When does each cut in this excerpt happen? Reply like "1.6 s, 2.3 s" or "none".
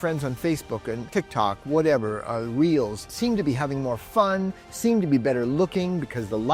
1.1 s, 3.1 s